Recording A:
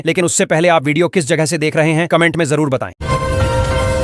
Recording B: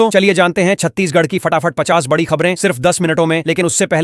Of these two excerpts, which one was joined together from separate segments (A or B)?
A